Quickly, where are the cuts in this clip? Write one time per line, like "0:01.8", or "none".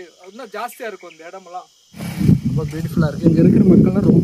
0:01.9